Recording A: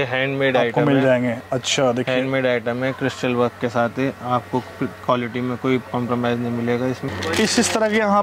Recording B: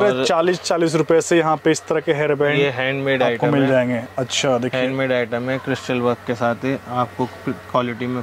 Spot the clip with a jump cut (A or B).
A